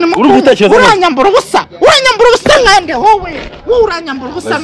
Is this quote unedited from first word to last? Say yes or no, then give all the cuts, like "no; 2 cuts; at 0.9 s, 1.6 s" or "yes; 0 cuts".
yes; 0 cuts